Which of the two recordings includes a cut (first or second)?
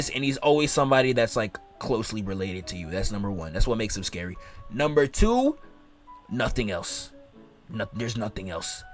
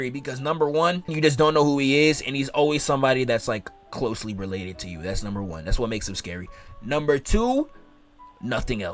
second